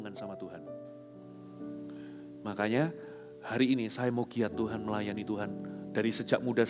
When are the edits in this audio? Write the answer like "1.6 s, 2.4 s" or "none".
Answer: none

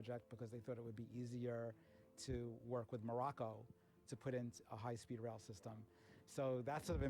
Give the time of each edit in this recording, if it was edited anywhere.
none

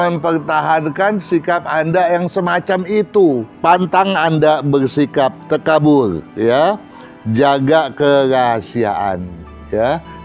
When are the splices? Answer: 3.5 s

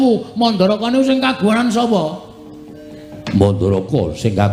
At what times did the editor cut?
none

